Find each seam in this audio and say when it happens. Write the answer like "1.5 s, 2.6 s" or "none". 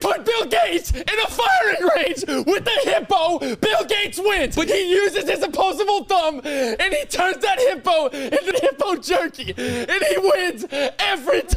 4.7 s, 8.5 s